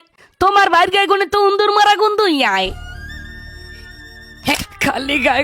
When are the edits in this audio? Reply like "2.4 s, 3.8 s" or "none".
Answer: 4.5 s